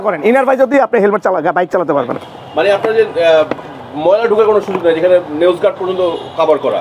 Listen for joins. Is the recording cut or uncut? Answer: uncut